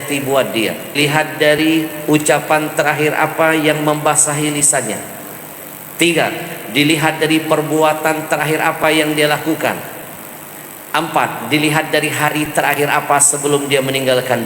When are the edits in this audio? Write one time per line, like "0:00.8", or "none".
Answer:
0:00.9